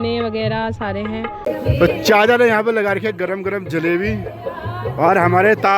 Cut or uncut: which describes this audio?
cut